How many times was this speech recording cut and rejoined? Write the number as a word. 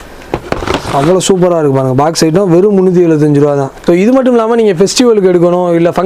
one